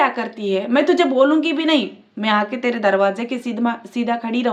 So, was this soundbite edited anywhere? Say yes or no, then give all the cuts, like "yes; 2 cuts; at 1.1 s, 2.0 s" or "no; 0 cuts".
no; 0 cuts